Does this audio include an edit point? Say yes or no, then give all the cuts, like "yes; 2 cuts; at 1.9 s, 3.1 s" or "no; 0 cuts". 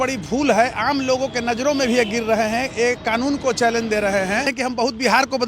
yes; 1 cut; at 4.5 s